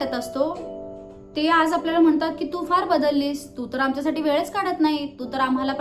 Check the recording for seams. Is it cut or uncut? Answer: uncut